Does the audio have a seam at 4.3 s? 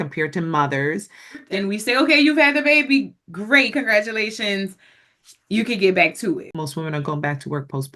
no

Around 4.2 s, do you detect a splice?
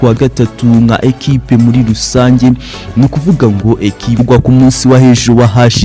yes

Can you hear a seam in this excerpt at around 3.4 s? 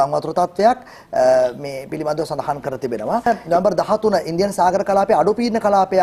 yes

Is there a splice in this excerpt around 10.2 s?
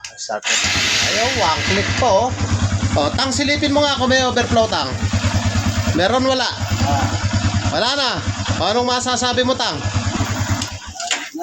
yes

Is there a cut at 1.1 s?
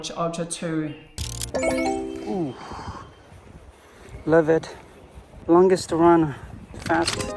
yes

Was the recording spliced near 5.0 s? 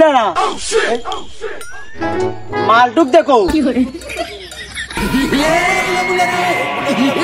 yes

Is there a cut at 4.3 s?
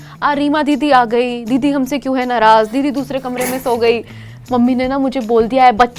yes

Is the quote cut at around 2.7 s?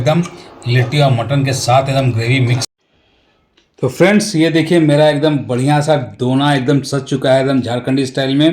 yes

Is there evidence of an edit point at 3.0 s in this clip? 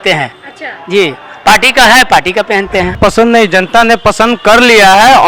yes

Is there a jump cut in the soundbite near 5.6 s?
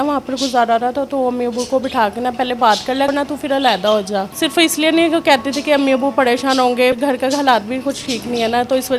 no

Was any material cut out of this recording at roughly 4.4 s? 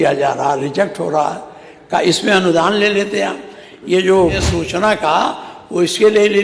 yes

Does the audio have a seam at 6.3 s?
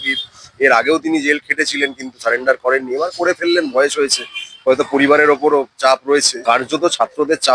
yes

